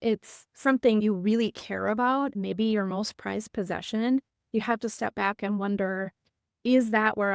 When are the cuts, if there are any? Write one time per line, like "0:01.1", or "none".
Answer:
0:01.0
0:02.3